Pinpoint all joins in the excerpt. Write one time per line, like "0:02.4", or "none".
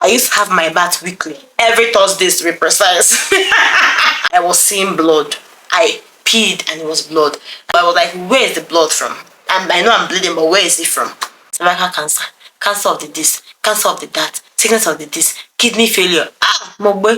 0:04.2
0:07.7
0:11.4